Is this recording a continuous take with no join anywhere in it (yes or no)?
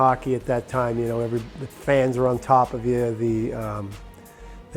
yes